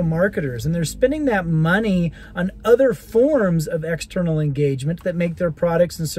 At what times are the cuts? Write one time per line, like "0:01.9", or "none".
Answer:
0:05.0